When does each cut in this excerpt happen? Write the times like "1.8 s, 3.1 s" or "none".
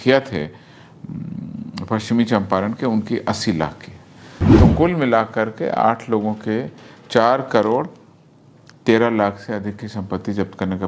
none